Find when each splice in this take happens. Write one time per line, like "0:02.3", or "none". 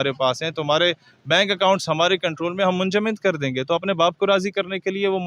none